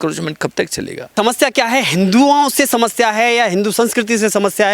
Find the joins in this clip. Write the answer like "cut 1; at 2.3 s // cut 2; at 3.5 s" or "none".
cut 1; at 1.1 s